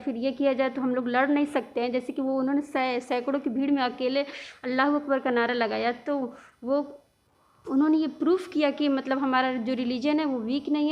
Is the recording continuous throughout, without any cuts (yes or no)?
yes